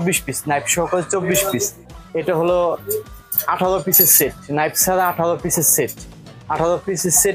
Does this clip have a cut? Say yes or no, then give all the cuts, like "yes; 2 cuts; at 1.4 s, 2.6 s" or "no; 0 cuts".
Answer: yes; 1 cut; at 1.8 s